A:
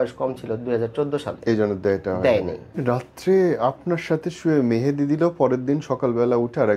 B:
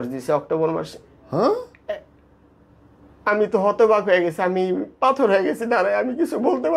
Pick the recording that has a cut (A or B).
A